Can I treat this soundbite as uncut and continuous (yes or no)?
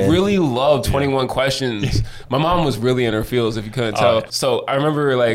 no